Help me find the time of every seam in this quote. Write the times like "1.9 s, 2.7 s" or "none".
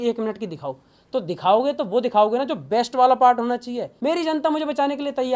3.9 s